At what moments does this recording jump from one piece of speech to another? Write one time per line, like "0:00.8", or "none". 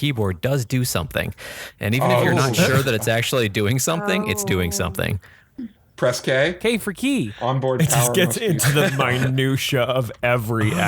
0:05.5